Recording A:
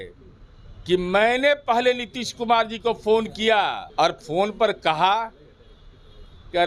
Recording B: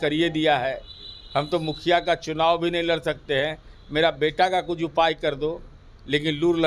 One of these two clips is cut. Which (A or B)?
A